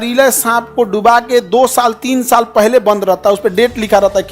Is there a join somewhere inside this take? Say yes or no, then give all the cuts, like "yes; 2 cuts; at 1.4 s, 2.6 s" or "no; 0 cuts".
no; 0 cuts